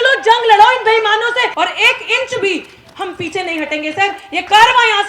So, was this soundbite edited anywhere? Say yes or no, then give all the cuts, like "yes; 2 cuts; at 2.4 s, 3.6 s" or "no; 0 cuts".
yes; 1 cut; at 1.5 s